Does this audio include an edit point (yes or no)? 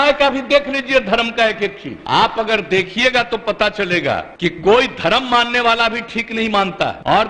no